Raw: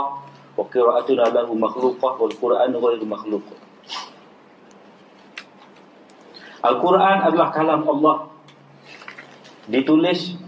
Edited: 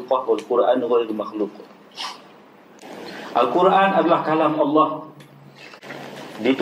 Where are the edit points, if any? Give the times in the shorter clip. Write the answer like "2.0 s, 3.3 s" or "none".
2.7 s